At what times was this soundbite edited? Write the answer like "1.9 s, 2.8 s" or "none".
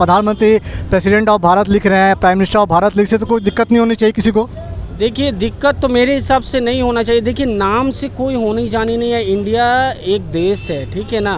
none